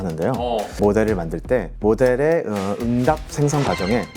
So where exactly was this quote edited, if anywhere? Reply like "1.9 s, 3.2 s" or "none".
0.8 s, 1.7 s